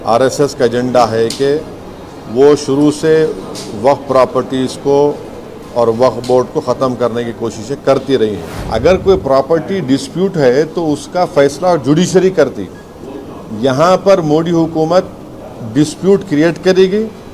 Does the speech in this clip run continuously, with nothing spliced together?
no; 1 cut; at 8.5 s

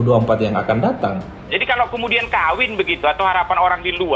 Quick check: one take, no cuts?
no; 1 cut; at 1.6 s

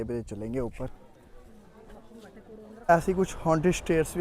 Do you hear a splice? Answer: yes; 2 cuts; at 0.9 s, 2.8 s

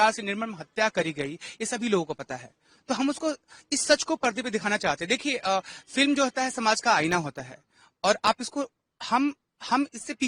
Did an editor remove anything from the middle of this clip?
no; 0 cuts

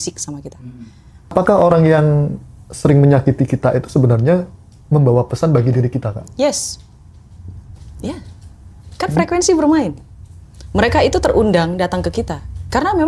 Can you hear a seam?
yes; 1 cut; at 1.3 s

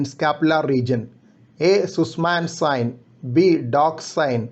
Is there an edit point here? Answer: no; 0 cuts

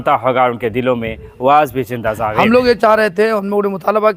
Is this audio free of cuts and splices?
no; 1 cut; at 2.3 s

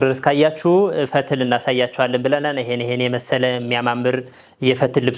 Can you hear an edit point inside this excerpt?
no; 0 cuts

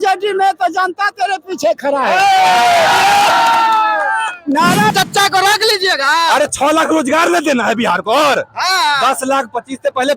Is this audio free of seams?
no; 1 cut; at 4.9 s

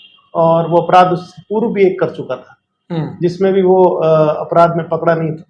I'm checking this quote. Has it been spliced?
no; 0 cuts

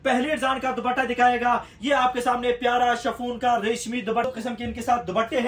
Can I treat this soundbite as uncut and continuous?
no; 1 cut; at 4.3 s

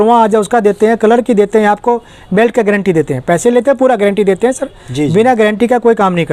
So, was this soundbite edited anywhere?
no; 0 cuts

